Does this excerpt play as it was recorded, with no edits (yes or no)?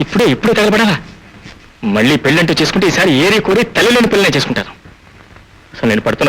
yes